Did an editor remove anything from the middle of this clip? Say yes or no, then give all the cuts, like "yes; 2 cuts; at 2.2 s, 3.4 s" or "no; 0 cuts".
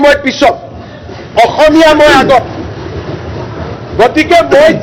no; 0 cuts